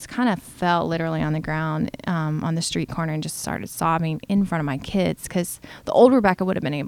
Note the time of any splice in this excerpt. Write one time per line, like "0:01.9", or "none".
none